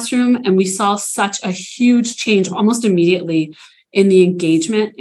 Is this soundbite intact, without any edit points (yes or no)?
yes